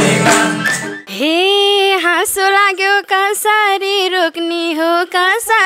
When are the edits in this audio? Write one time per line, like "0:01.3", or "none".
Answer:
0:01.0